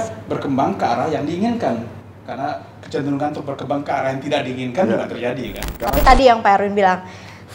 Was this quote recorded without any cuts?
no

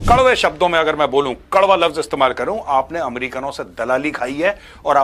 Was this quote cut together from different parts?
no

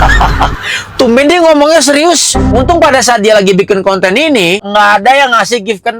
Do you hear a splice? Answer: yes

